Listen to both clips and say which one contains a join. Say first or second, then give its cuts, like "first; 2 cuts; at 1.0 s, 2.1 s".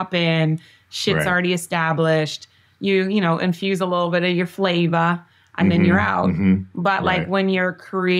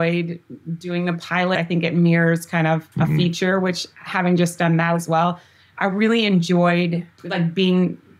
second; 3 cuts; at 1.5 s, 2.9 s, 7.2 s